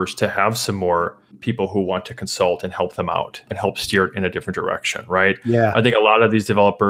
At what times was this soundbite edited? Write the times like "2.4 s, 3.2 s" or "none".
3.5 s